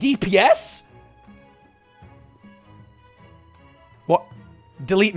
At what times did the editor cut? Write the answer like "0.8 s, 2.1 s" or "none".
none